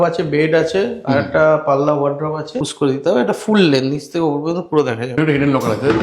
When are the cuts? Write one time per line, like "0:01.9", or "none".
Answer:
0:02.6
0:05.1